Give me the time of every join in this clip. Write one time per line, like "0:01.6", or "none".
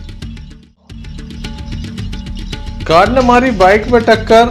0:01.3
0:02.8